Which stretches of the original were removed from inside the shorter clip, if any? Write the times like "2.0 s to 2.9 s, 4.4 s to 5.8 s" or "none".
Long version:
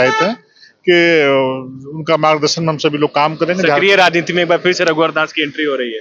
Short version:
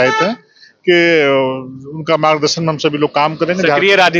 none